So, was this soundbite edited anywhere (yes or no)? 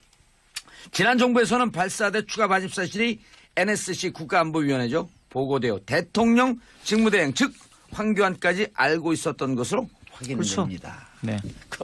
yes